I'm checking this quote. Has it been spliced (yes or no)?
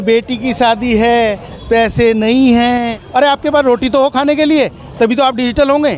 yes